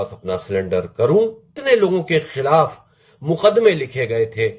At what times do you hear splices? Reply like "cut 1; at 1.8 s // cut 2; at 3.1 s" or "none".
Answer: cut 1; at 1.5 s